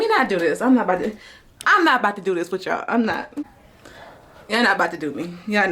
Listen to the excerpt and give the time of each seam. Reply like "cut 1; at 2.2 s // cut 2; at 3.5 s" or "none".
none